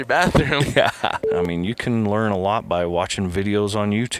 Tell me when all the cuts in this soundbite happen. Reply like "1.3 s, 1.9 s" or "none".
1.4 s